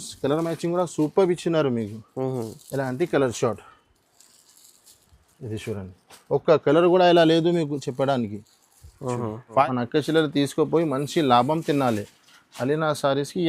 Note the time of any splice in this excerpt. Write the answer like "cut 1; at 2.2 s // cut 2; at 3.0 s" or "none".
cut 1; at 9.6 s

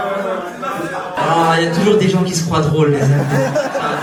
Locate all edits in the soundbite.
none

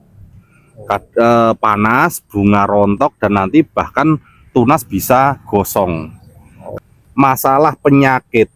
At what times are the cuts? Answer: cut 1; at 6.7 s

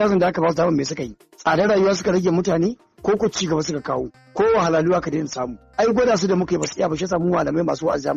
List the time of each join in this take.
none

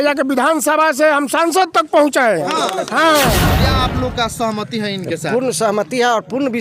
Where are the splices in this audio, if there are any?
cut 1; at 3.6 s

